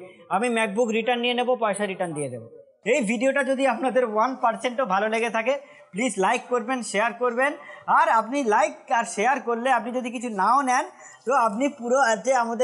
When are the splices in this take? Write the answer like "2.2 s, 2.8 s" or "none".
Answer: 2.7 s